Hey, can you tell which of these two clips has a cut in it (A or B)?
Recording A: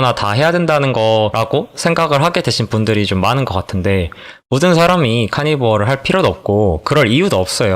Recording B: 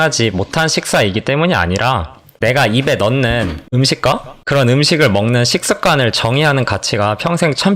A